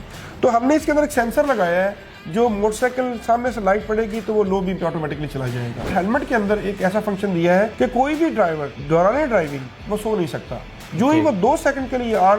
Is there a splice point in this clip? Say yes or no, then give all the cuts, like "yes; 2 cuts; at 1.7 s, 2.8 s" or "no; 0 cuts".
yes; 3 cuts; at 5.9 s, 7.7 s, 8.7 s